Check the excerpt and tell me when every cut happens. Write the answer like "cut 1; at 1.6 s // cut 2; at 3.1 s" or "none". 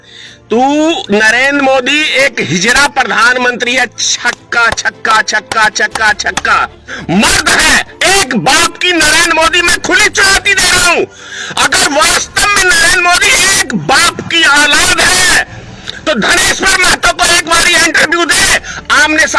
cut 1; at 6.9 s